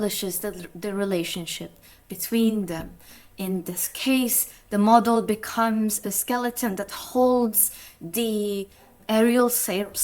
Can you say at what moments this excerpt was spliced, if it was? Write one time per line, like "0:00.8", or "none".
0:06.1
0:09.0

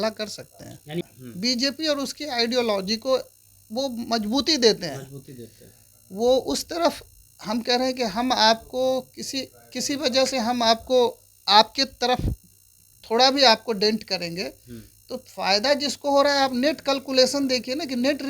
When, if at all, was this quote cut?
0:01.0

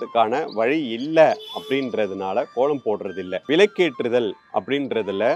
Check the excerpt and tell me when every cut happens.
0:03.4

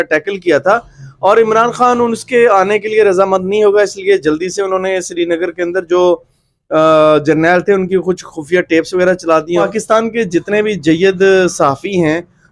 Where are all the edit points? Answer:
0:09.6

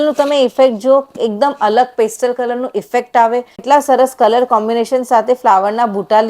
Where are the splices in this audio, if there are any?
0:03.6

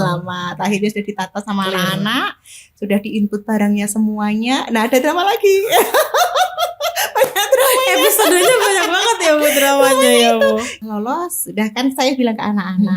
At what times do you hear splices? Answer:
0:10.8

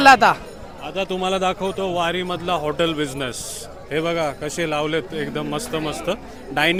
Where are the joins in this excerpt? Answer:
none

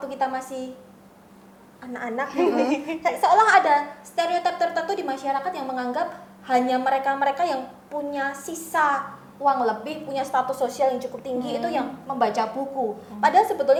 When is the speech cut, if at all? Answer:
none

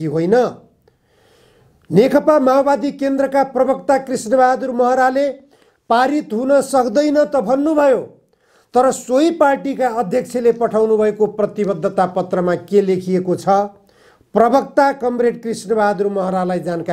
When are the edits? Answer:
none

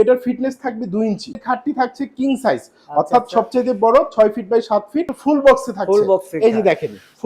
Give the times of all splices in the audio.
0:01.4
0:05.1

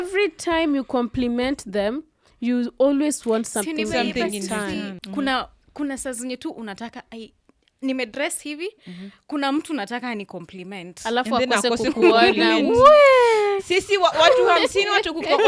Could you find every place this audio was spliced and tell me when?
0:05.0

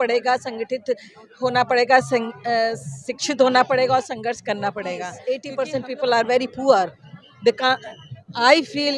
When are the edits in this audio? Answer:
0:05.1

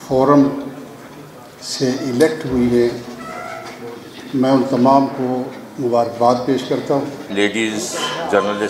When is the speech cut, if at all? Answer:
0:07.2

